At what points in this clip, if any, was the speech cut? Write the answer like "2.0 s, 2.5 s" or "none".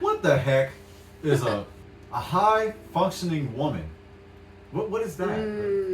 1.7 s